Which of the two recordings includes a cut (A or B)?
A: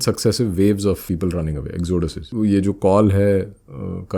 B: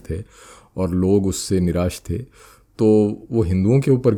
A